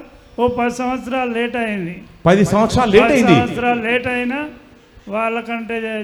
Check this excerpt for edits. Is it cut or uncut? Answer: uncut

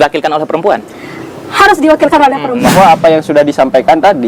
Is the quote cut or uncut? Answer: cut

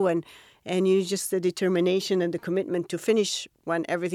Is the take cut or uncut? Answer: uncut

